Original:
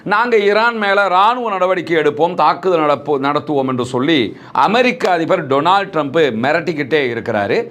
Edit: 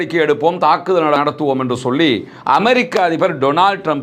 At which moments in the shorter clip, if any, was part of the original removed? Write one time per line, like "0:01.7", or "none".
0:01.2